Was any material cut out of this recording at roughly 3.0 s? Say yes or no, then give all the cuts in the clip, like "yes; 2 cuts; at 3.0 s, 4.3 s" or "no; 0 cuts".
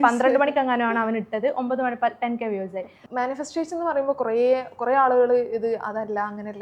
yes; 1 cut; at 3.0 s